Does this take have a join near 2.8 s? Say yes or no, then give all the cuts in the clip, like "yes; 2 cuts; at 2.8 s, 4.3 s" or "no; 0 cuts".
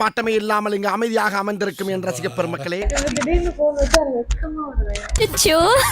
yes; 1 cut; at 2.8 s